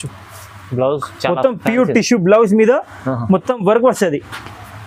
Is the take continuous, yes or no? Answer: yes